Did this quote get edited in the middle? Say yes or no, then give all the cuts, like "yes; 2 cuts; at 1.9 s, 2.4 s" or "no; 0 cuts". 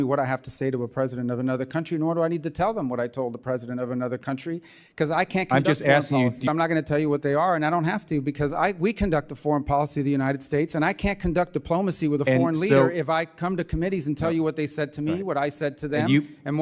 yes; 1 cut; at 6.5 s